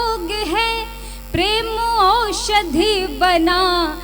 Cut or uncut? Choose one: uncut